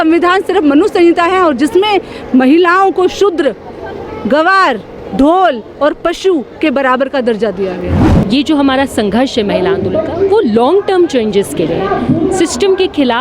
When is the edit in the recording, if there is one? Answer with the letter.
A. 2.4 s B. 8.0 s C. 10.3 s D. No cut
B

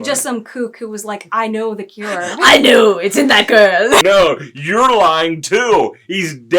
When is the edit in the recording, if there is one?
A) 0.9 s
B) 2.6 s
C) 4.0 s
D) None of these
C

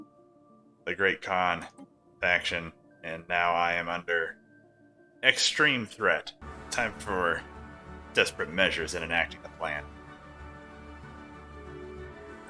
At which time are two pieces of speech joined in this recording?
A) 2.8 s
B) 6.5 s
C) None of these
B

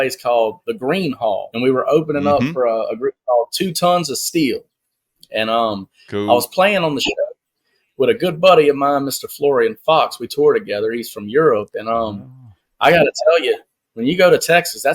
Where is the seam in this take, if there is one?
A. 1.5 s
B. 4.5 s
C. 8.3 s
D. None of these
A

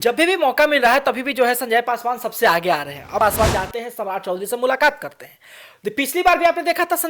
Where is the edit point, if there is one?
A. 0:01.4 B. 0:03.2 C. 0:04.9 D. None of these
B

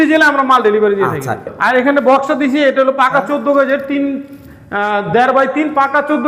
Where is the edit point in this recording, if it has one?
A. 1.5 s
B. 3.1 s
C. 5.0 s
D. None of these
A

